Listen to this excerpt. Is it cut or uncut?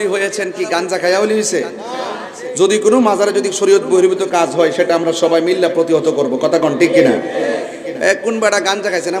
uncut